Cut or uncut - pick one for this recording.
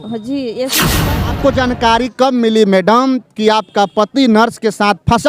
cut